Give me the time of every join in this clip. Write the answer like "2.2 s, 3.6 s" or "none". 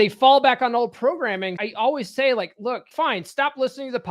1.5 s, 2.9 s

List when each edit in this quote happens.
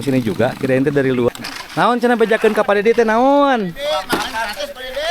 1.3 s

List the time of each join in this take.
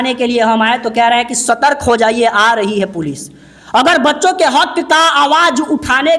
none

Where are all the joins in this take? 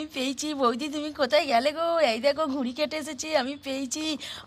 none

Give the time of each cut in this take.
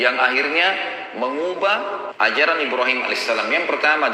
2.1 s

